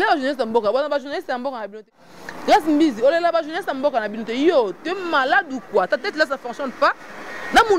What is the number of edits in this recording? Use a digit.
1